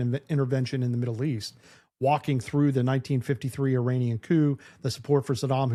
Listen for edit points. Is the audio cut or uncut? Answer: uncut